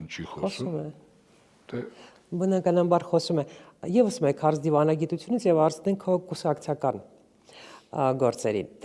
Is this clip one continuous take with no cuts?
yes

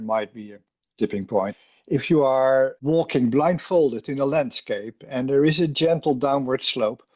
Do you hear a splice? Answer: yes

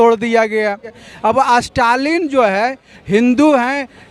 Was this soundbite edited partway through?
yes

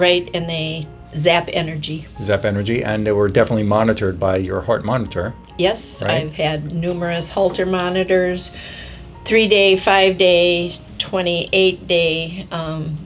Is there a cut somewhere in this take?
no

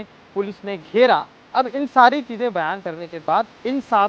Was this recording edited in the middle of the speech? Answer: yes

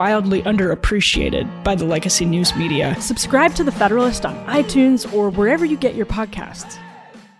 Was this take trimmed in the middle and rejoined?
yes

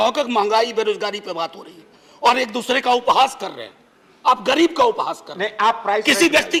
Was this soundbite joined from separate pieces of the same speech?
no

